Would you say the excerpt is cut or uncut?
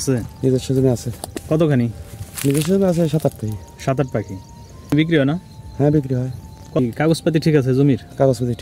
cut